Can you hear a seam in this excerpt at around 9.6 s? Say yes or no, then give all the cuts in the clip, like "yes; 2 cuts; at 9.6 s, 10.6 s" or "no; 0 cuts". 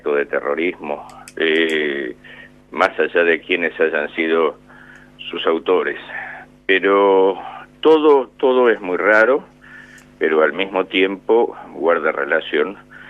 yes; 1 cut; at 9.6 s